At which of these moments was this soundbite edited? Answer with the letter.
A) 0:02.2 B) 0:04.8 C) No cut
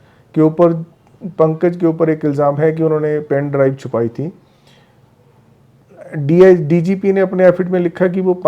C